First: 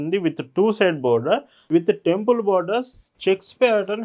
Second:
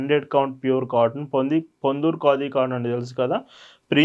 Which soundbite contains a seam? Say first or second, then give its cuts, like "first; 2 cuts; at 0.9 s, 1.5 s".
first; 1 cut; at 1.5 s